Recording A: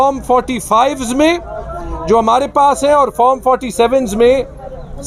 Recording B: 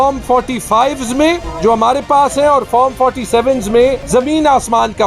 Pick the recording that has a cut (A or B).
B